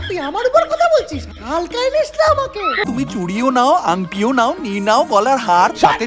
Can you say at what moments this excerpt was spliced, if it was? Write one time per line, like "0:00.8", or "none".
0:02.8